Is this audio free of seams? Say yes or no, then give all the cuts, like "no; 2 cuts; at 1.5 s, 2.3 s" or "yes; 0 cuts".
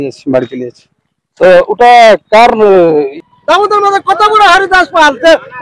no; 1 cut; at 3.1 s